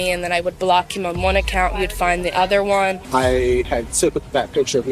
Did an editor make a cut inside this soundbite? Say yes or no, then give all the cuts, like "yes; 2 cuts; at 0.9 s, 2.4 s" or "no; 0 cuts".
yes; 2 cuts; at 3.0 s, 3.7 s